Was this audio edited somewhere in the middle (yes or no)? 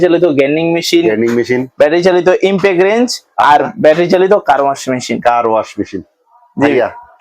no